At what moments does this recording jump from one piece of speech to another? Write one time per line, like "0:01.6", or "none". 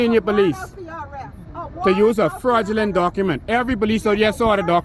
0:03.6